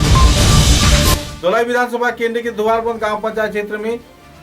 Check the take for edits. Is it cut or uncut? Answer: cut